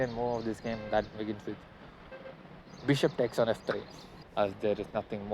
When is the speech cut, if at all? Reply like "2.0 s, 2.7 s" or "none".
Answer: 4.2 s